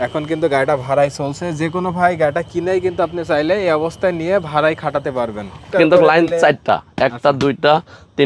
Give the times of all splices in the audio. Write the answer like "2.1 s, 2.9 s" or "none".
5.7 s